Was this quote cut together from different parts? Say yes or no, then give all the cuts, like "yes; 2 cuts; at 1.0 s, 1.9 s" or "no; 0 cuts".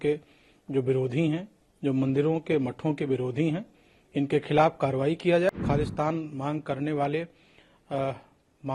yes; 1 cut; at 5.5 s